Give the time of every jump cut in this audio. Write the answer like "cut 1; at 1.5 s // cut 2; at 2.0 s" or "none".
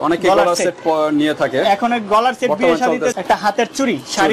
cut 1; at 3.1 s

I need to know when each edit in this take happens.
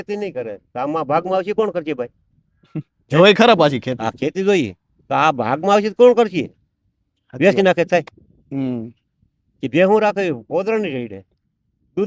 none

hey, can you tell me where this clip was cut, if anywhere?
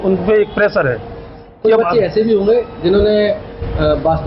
none

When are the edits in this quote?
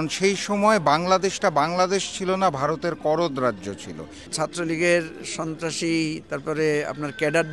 cut 1; at 4.2 s

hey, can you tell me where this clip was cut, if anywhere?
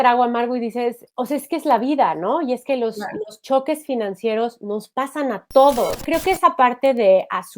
cut 1; at 6.0 s

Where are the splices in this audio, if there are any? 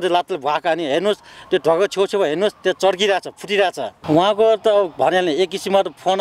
cut 1; at 3.9 s

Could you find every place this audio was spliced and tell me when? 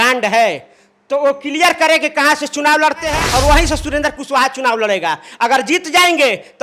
cut 1; at 3.2 s

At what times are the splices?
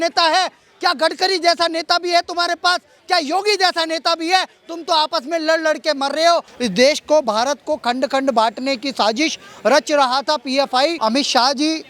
cut 1; at 6.5 s // cut 2; at 11.0 s

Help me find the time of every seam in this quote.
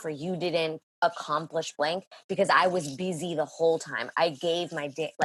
none

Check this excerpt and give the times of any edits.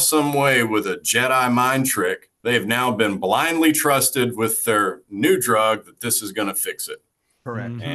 cut 1; at 2.3 s

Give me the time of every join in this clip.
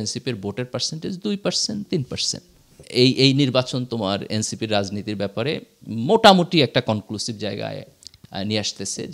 cut 1; at 2.8 s

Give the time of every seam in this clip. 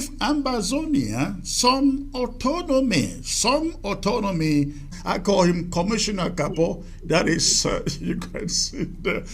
cut 1; at 4.9 s

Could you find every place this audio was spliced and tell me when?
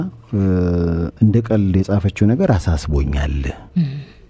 none

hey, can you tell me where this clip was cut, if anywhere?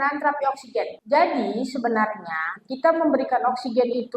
cut 1; at 1.0 s

